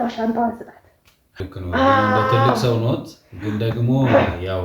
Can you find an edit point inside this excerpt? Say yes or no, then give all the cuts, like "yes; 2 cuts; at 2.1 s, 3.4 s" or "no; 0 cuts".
yes; 1 cut; at 1.4 s